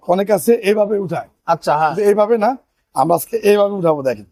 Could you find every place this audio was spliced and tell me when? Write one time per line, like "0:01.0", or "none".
none